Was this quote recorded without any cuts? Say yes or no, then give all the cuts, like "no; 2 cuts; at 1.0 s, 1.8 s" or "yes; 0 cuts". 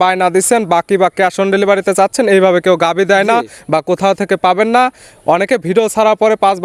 yes; 0 cuts